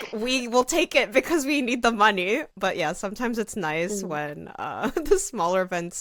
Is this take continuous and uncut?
yes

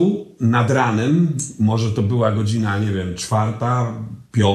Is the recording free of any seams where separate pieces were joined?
yes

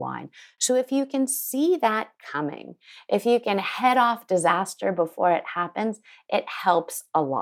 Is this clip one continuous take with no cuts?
yes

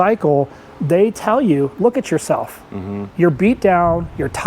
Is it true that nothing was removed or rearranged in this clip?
yes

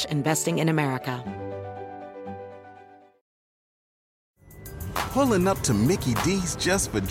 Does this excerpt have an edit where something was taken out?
yes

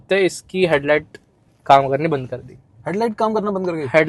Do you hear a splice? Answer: no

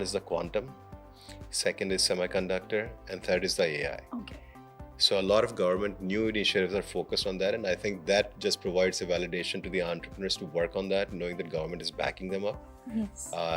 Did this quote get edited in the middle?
no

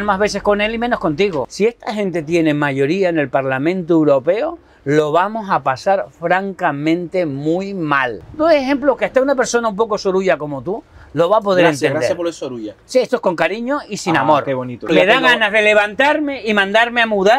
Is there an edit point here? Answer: yes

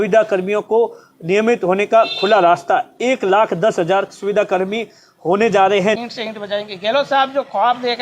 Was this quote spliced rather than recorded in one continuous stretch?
yes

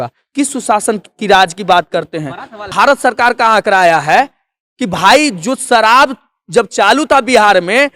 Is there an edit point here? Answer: yes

